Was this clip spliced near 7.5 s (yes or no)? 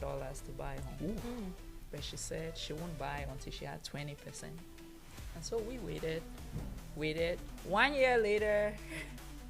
yes